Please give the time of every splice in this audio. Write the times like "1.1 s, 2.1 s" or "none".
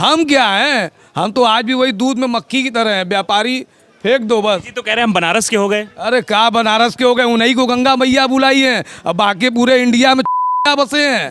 none